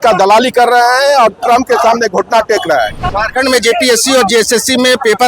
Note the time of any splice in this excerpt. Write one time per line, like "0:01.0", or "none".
0:03.1